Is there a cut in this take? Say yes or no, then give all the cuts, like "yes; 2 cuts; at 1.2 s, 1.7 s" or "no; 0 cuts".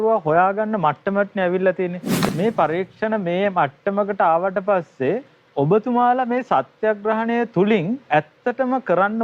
yes; 1 cut; at 2.1 s